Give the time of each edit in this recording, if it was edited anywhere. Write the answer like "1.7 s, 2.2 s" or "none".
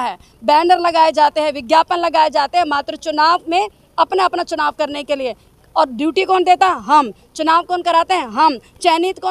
none

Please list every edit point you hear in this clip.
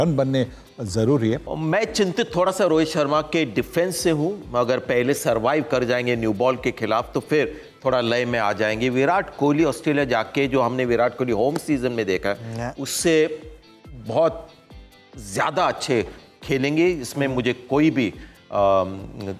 1.5 s

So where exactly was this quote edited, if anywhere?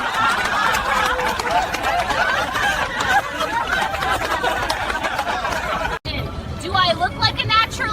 6.0 s

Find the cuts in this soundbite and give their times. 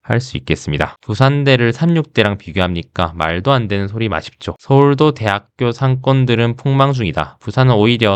1.0 s

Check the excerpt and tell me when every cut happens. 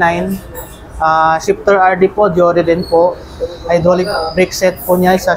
none

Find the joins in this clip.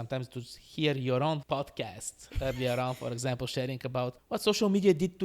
1.4 s, 4.2 s

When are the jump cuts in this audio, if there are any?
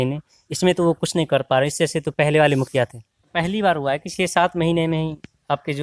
3.3 s

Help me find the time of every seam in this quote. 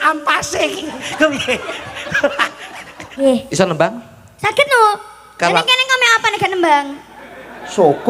3.2 s

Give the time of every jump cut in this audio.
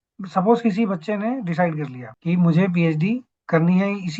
2.0 s

